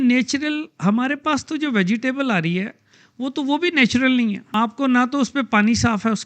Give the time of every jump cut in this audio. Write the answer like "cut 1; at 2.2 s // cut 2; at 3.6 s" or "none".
cut 1; at 4.5 s